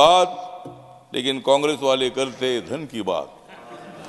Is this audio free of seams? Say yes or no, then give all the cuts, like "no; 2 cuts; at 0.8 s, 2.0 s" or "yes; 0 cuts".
yes; 0 cuts